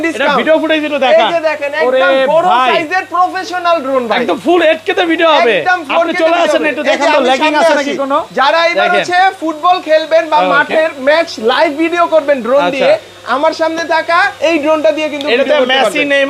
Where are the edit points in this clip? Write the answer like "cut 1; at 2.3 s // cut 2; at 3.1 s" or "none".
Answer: none